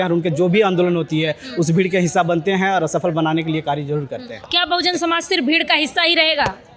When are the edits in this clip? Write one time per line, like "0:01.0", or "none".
none